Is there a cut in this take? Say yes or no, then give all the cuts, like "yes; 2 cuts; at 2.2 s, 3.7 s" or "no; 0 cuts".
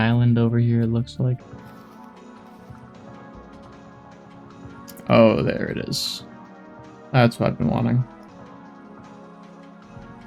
yes; 2 cuts; at 1.4 s, 8.3 s